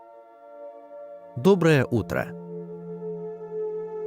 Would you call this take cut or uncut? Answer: cut